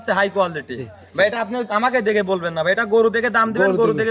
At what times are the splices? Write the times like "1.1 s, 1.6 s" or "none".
none